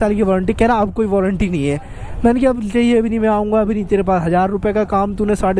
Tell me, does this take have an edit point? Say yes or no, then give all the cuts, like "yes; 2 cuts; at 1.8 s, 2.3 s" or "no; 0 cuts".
no; 0 cuts